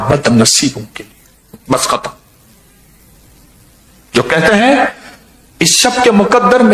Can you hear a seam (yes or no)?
no